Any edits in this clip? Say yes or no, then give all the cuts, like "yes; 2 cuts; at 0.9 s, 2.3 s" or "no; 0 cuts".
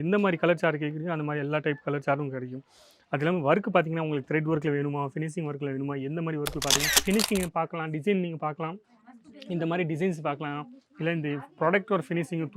yes; 1 cut; at 6.9 s